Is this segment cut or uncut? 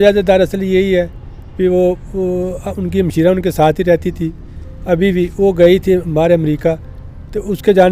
uncut